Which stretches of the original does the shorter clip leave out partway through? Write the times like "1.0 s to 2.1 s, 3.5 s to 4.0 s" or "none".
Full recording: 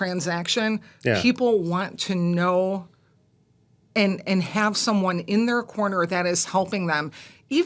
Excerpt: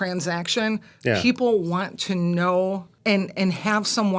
2.9 s to 3.8 s